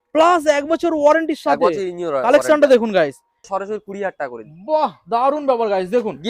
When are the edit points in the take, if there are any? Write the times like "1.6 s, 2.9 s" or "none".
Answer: 3.5 s